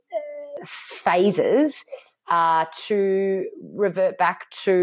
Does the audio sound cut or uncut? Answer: uncut